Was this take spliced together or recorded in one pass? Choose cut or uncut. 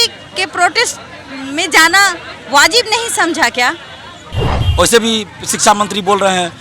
cut